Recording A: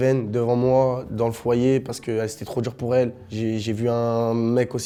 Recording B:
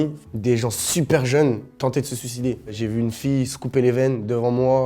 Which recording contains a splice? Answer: B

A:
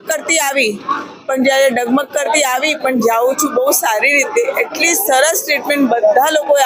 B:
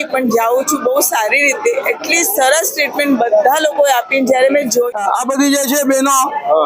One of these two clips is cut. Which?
B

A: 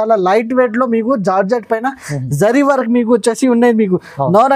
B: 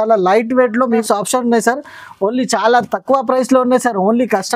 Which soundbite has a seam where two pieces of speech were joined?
B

